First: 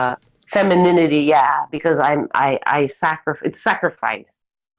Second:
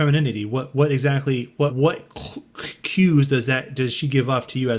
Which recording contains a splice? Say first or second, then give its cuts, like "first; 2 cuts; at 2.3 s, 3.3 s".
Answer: second; 1 cut; at 1.7 s